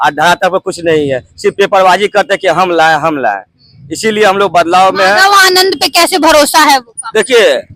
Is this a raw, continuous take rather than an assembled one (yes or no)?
yes